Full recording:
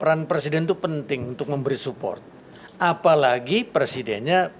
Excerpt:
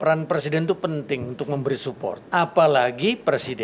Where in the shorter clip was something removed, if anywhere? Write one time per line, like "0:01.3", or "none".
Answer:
0:02.2